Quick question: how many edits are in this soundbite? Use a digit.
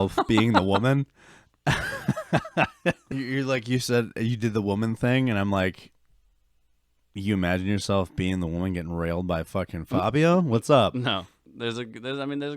2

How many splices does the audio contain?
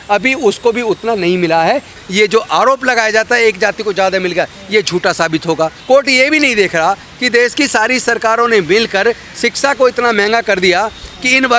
1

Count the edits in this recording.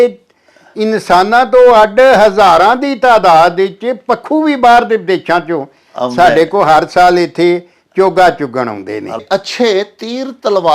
1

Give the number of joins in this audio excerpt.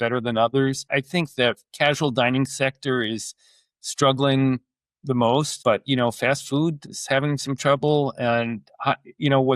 2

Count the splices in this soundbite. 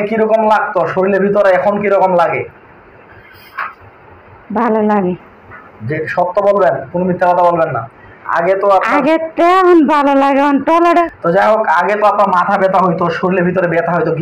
0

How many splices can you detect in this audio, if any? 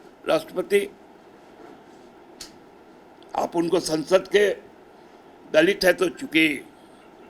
0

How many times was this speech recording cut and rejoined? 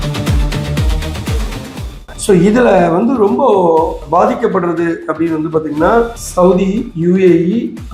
2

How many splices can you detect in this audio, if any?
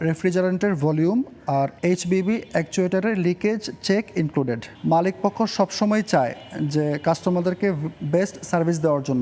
1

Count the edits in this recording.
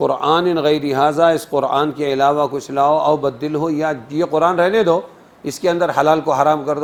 0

